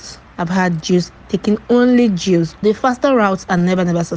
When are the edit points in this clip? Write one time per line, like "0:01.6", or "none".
0:02.6